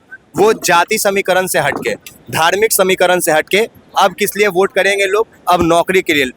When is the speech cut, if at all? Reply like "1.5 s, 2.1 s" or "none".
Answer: none

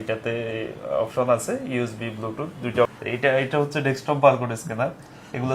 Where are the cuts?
2.9 s

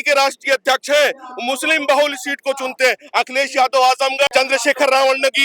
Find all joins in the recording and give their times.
4.3 s

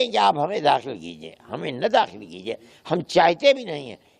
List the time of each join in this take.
none

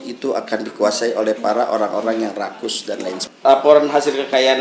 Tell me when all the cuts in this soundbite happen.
3.2 s

